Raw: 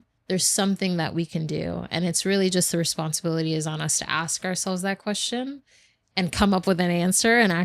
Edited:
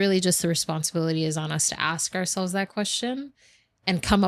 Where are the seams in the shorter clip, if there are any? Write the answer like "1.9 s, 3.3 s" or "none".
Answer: none

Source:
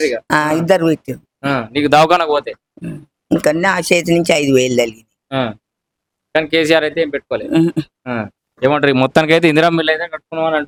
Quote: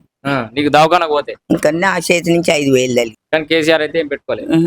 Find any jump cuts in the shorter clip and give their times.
1.3 s, 3.2 s

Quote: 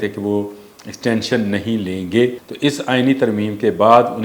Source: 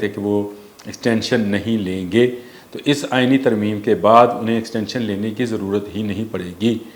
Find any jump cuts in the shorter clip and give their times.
2.5 s

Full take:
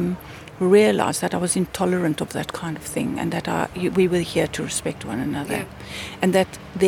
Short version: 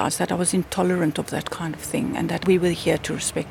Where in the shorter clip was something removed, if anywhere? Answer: 2.4 s

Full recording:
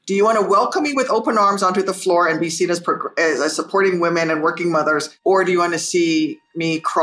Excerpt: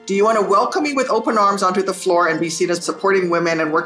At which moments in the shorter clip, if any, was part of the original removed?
2.8 s

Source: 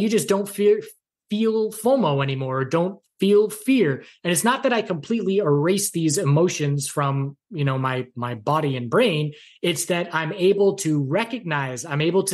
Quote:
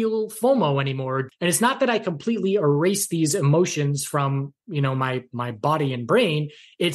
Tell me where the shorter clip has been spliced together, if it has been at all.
1.2 s

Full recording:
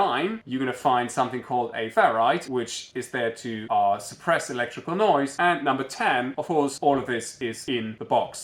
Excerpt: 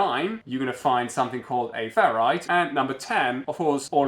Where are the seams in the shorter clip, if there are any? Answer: 2.4 s

